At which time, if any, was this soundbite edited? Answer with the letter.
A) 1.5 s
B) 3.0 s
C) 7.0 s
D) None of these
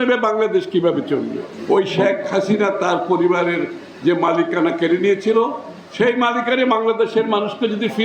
A